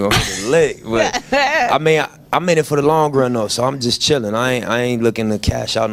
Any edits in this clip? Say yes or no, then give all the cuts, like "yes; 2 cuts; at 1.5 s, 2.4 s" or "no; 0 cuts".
no; 0 cuts